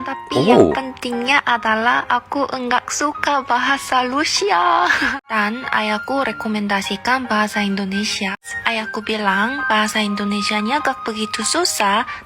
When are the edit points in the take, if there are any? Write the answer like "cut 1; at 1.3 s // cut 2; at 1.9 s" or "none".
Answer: cut 1; at 5.1 s // cut 2; at 8.3 s